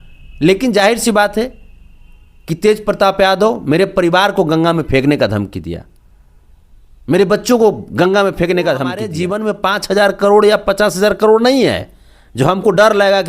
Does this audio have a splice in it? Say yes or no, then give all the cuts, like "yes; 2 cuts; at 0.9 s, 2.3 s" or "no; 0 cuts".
yes; 1 cut; at 9.2 s